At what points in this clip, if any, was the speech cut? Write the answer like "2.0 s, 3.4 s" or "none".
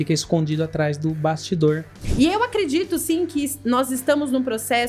2.0 s